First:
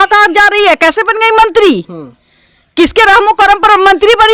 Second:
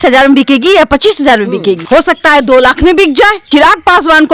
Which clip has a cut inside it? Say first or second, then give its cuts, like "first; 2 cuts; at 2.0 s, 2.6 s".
second; 2 cuts; at 1.8 s, 3.4 s